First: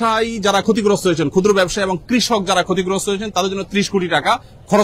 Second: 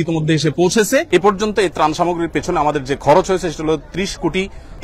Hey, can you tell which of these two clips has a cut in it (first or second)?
second